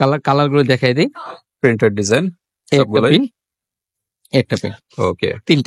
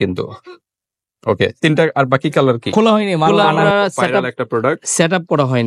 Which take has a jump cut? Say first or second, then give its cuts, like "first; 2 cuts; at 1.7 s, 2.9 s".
second; 1 cut; at 3.3 s